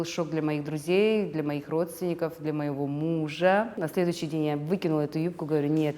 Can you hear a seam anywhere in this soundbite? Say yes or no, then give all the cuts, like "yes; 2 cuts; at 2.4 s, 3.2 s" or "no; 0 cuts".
yes; 1 cut; at 3.8 s